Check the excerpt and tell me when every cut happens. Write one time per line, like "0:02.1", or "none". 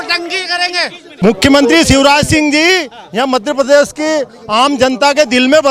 0:01.0

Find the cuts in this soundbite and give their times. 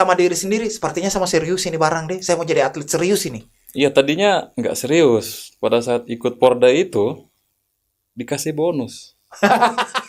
none

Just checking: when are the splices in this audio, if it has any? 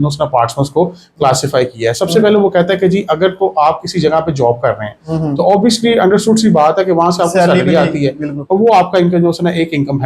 none

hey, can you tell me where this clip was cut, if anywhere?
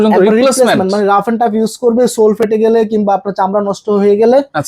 none

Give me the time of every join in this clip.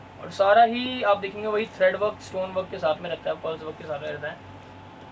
none

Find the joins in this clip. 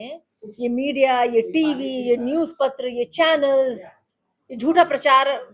none

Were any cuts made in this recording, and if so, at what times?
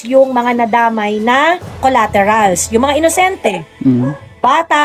none

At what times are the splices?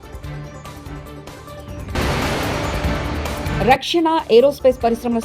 0:01.6
0:03.5

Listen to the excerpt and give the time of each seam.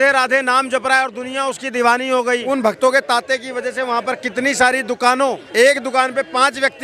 0:02.4
0:05.4

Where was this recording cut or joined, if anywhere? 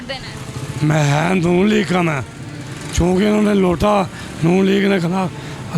none

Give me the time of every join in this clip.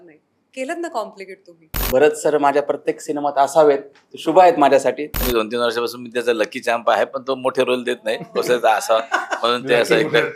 0:01.7
0:05.2

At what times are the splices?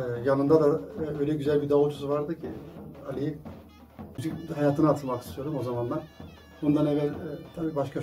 0:04.2

